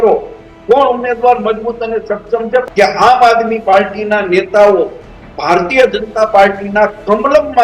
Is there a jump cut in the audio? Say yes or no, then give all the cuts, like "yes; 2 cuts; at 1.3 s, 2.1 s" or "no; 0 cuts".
yes; 1 cut; at 2.7 s